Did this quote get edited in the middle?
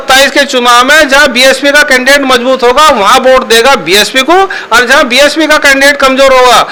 no; 0 cuts

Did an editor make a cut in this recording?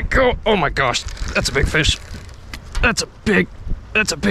no; 0 cuts

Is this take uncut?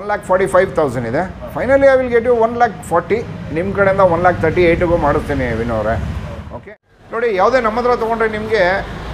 no; 1 cut; at 6.6 s

